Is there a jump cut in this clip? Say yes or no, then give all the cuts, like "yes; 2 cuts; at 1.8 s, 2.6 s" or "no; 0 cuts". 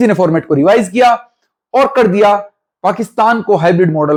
no; 0 cuts